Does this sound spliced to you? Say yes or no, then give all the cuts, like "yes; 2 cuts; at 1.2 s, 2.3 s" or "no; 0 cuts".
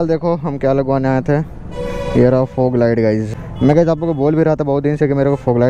no; 0 cuts